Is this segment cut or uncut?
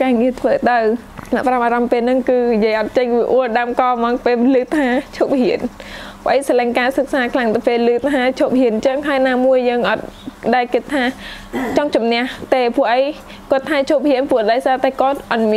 cut